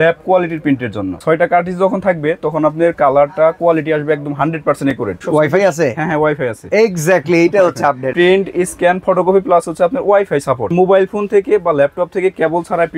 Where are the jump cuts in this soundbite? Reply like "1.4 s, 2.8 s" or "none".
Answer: 1.2 s, 5.2 s, 8.1 s, 10.7 s